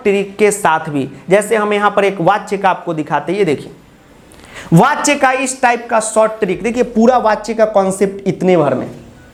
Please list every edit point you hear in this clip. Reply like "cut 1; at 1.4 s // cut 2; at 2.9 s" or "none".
none